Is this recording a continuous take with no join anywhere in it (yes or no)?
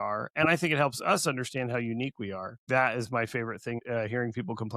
no